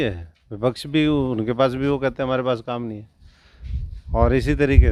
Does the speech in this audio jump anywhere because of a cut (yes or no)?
no